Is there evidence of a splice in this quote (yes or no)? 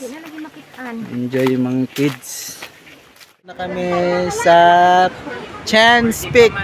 yes